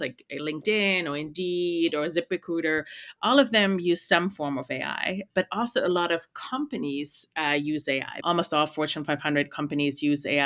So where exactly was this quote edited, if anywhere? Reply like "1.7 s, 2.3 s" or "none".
8.1 s